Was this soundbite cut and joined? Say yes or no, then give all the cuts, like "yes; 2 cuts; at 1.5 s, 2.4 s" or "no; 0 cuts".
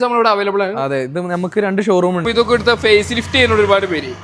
yes; 1 cut; at 2.2 s